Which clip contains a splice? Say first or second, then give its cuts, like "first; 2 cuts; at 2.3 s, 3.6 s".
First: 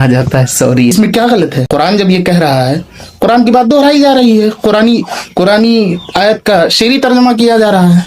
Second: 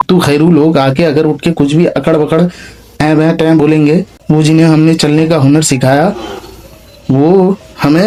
first; 1 cut; at 0.9 s